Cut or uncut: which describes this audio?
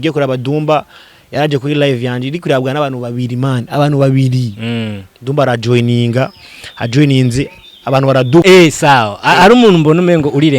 cut